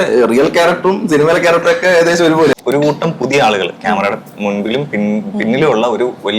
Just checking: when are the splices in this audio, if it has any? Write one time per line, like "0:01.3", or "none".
0:02.5